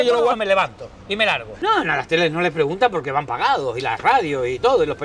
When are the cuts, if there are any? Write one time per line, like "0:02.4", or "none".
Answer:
0:01.6

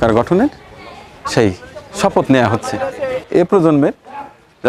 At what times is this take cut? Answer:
0:03.3

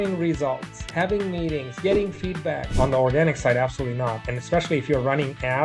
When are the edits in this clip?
0:02.7

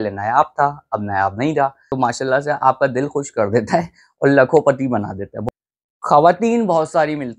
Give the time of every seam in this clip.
0:01.8
0:05.4

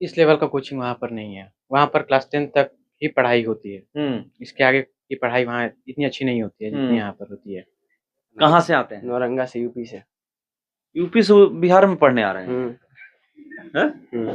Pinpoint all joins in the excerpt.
0:08.3

